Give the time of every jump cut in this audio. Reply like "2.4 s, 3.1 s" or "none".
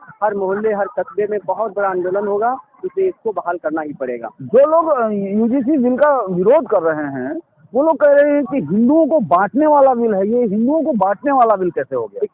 none